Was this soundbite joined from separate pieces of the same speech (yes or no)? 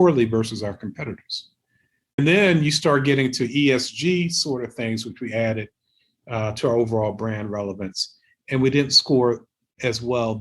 yes